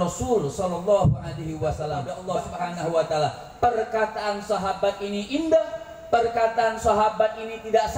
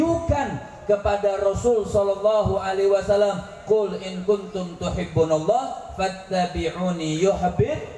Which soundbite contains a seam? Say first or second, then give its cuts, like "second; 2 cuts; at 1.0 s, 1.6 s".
first; 1 cut; at 2.1 s